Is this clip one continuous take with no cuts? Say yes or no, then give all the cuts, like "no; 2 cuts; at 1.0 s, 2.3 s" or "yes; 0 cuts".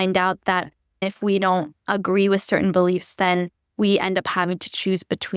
no; 1 cut; at 1.0 s